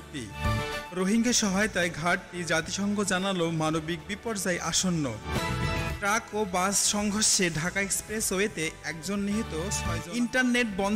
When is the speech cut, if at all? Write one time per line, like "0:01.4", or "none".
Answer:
0:09.8